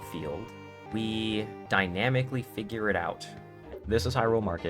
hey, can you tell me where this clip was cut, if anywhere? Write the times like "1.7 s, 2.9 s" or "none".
0.8 s, 1.6 s, 3.7 s

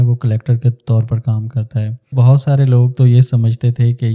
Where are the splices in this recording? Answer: 2.1 s

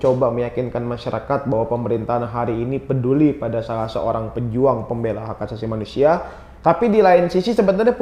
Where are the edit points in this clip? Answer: none

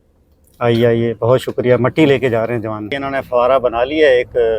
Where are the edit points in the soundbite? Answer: 3.0 s

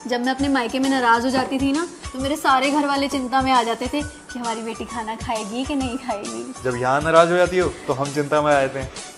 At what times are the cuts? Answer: none

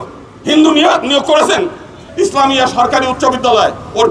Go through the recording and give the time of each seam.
2.0 s

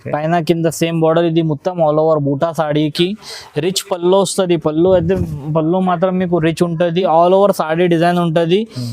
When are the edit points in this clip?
7.0 s

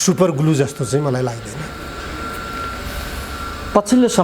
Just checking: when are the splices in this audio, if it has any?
none

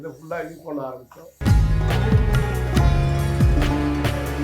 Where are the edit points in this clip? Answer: 1.3 s

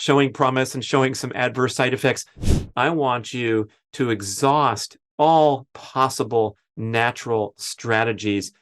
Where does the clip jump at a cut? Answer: 2.5 s

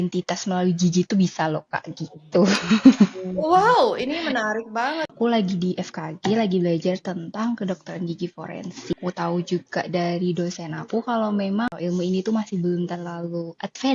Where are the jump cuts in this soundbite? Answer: 5.1 s, 9.0 s, 11.7 s

